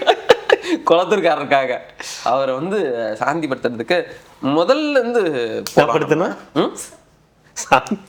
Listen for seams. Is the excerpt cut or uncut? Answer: uncut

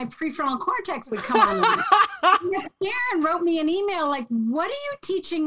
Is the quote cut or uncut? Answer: uncut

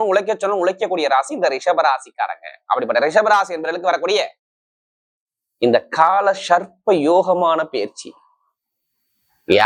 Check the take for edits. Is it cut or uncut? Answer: uncut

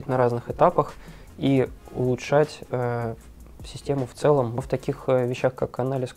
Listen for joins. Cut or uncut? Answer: cut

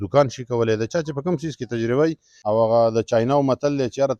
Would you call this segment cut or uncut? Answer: cut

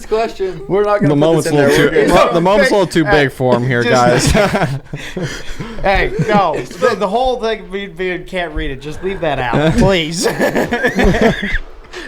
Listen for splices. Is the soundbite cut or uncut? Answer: uncut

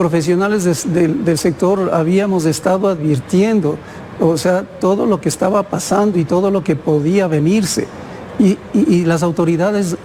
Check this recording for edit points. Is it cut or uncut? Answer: uncut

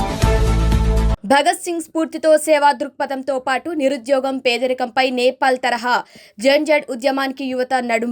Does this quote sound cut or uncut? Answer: cut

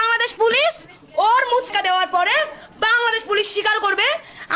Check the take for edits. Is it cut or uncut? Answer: cut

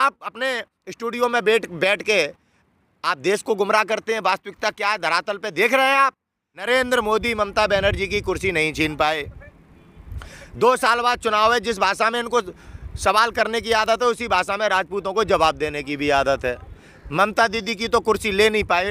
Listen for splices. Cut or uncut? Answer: cut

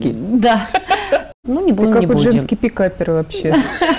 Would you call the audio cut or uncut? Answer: cut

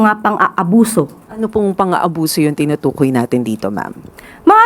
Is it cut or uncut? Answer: cut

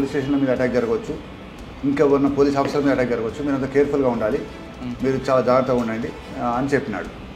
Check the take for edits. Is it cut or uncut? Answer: cut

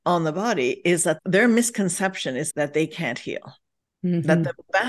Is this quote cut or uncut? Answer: cut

